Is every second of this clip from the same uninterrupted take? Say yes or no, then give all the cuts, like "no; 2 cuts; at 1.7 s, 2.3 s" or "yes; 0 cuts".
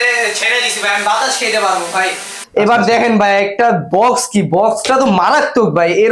no; 1 cut; at 2.4 s